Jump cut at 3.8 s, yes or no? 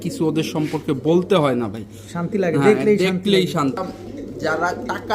yes